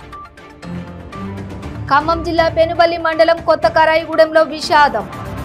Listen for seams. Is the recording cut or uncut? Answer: uncut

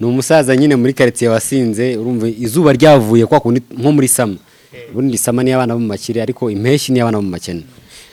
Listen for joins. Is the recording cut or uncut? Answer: uncut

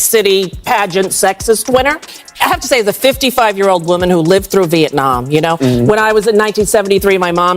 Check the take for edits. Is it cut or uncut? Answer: cut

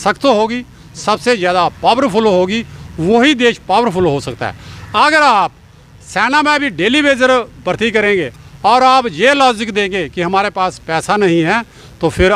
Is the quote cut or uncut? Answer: uncut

